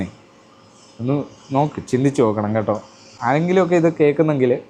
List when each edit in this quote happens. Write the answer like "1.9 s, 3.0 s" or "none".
none